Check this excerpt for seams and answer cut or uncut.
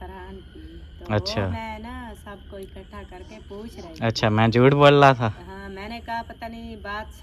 uncut